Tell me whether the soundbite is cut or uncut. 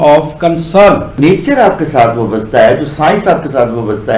cut